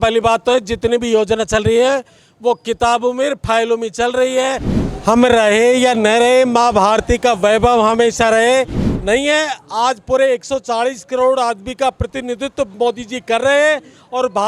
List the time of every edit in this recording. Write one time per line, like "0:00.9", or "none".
0:04.8
0:08.9